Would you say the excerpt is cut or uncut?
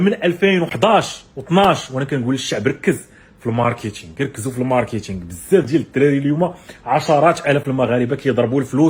uncut